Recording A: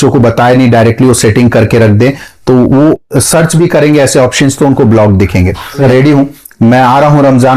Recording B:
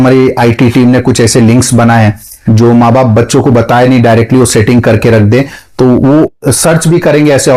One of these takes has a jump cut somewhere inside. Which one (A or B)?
A